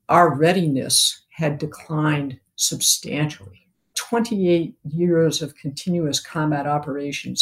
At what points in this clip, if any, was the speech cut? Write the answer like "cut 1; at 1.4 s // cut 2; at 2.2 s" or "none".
cut 1; at 4.0 s